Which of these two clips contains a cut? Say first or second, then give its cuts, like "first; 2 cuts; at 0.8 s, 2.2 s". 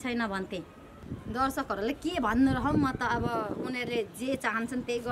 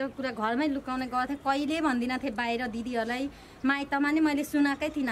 first; 1 cut; at 1.0 s